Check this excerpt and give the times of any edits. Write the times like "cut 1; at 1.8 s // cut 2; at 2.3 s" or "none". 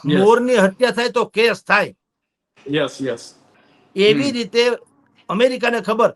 none